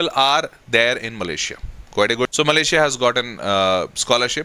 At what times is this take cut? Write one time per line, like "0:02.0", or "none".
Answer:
0:02.3